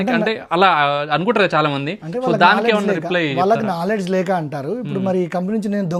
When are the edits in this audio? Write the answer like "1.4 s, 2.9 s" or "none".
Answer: none